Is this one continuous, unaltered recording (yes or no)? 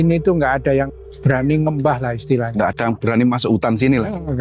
no